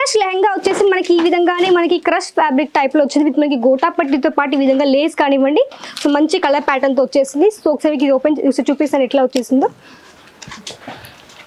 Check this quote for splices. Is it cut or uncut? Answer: uncut